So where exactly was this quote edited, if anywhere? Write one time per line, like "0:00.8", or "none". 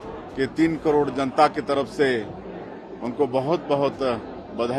none